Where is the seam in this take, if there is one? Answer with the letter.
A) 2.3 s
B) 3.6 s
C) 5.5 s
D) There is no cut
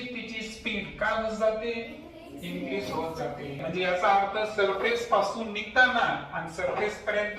B